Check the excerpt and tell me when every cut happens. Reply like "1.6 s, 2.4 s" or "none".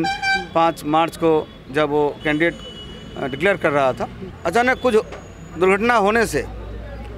4.3 s